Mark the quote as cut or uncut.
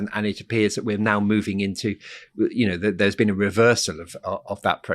uncut